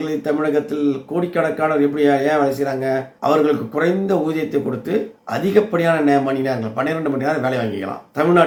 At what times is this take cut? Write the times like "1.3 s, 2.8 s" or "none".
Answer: none